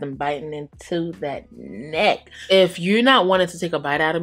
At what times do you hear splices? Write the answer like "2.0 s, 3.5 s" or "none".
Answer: 2.4 s